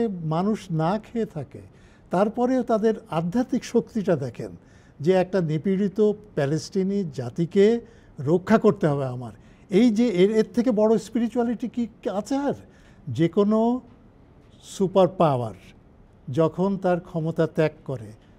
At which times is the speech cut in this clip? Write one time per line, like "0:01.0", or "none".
0:12.8